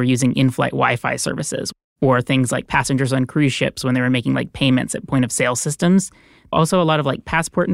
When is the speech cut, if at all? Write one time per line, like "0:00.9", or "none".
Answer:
0:01.7
0:06.5